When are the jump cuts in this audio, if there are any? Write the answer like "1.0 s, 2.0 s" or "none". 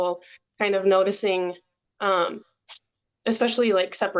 none